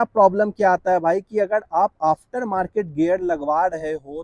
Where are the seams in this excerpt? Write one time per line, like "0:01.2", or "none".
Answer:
none